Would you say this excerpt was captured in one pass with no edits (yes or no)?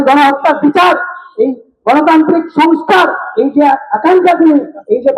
yes